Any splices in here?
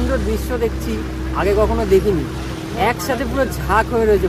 no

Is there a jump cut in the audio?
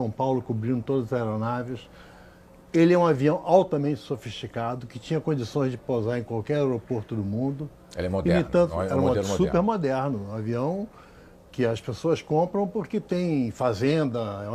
no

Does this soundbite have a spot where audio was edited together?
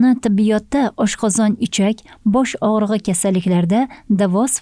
no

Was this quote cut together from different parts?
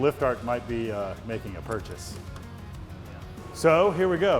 yes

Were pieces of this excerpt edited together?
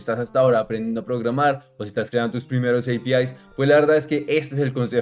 no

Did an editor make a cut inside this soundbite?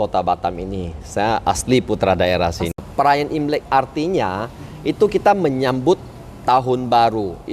yes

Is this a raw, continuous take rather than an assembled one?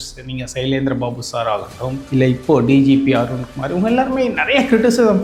yes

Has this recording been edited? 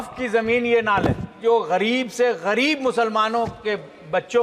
yes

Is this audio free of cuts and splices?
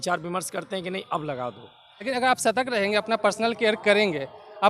no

